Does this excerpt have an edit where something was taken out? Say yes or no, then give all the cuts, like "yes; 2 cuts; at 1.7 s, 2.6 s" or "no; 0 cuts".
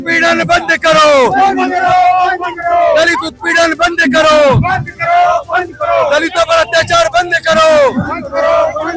no; 0 cuts